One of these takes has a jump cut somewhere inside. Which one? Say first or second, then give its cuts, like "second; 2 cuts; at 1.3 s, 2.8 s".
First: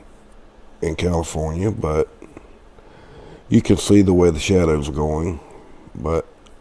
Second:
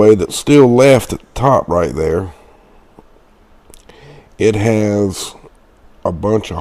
second; 1 cut; at 1.8 s